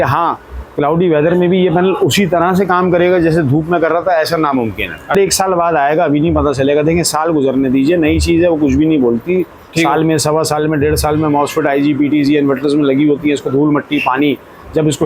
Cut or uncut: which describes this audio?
cut